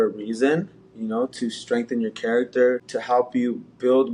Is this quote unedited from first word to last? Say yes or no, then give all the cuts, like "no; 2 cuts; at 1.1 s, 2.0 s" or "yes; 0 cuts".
no; 1 cut; at 2.9 s